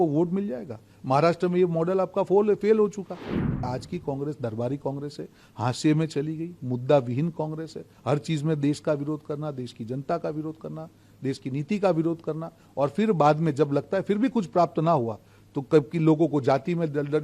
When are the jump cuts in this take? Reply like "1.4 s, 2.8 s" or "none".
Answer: 3.6 s